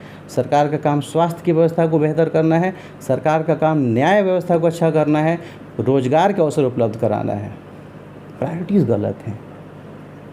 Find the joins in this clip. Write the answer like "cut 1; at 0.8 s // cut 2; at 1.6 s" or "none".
none